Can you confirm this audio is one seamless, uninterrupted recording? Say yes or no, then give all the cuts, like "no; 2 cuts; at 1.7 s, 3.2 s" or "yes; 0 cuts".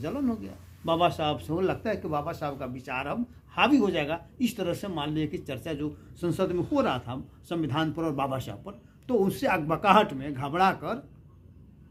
yes; 0 cuts